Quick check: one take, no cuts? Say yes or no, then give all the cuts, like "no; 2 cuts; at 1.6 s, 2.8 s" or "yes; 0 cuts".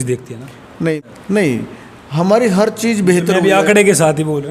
no; 1 cut; at 0.9 s